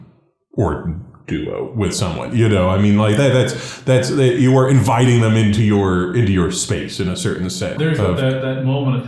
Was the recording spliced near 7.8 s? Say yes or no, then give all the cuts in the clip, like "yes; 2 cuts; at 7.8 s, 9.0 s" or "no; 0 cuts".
yes; 1 cut; at 7.8 s